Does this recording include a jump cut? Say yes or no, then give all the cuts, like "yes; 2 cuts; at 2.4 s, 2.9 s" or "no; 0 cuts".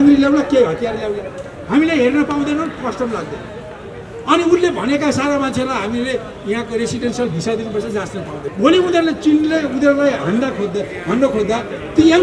yes; 1 cut; at 8.4 s